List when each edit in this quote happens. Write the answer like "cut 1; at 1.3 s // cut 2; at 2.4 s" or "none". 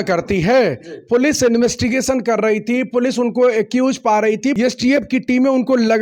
cut 1; at 4.6 s